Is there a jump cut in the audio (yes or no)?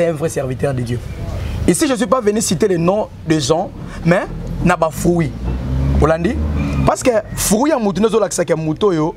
no